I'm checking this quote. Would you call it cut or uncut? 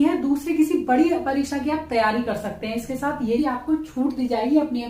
cut